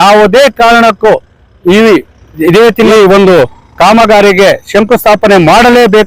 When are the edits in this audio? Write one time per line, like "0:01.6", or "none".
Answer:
0:02.9